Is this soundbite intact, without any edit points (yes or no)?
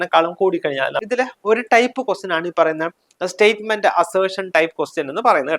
no